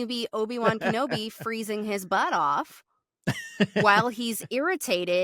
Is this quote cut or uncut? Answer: uncut